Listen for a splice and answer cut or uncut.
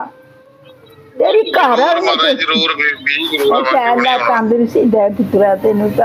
uncut